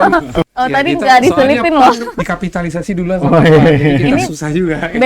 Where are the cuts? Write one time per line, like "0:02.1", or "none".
0:02.1